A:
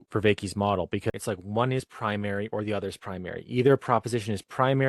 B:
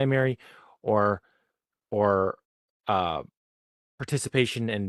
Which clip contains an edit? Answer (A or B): A